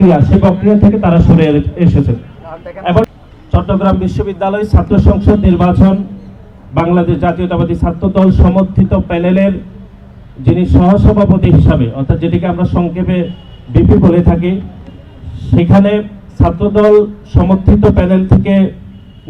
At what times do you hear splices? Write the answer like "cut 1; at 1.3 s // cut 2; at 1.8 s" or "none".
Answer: cut 1; at 3.0 s